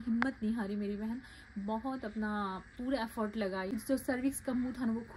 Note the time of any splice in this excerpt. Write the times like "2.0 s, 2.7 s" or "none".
3.7 s